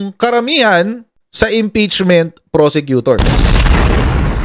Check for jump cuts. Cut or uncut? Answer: uncut